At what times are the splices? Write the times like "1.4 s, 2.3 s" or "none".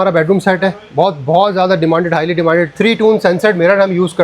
2.7 s